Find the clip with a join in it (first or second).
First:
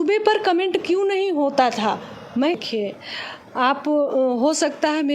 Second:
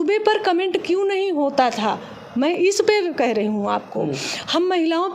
first